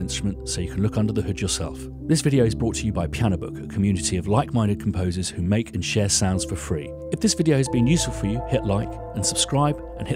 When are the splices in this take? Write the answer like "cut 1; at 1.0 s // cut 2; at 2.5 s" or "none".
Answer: none